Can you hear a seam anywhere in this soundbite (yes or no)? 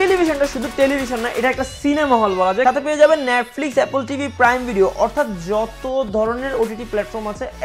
yes